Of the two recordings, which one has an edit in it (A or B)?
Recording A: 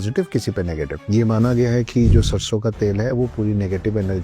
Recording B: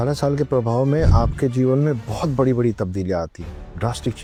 A